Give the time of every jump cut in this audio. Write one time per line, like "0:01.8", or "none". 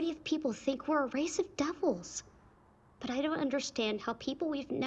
none